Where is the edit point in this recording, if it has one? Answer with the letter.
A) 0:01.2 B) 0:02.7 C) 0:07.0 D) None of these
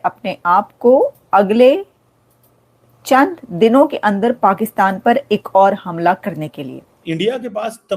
C